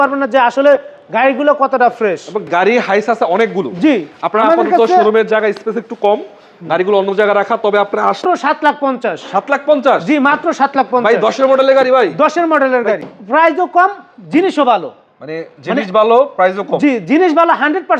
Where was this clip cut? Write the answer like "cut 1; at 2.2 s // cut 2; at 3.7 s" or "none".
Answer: cut 1; at 2.5 s // cut 2; at 8.2 s // cut 3; at 13.1 s